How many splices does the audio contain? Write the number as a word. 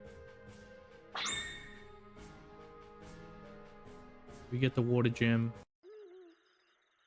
zero